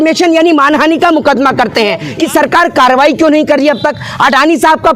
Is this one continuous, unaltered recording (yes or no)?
no